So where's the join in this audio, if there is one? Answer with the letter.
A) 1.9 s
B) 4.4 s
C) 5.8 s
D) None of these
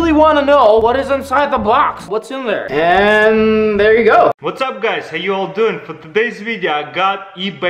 B